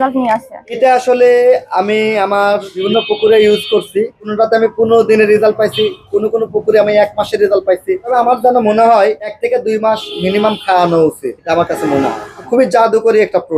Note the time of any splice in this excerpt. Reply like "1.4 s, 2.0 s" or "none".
none

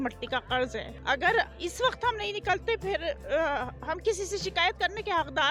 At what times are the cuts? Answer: none

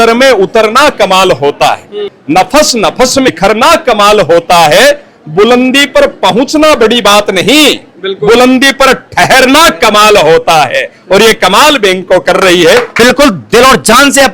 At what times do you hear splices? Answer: 2.1 s, 3.3 s, 12.9 s

